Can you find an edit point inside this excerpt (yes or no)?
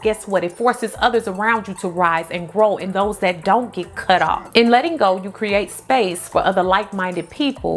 yes